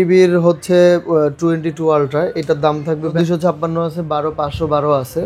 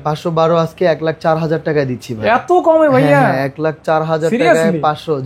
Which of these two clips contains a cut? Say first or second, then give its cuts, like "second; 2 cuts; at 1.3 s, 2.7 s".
first; 1 cut; at 3.1 s